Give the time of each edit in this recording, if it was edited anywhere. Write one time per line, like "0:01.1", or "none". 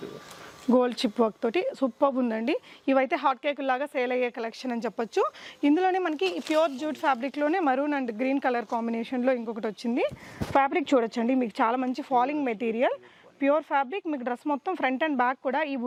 none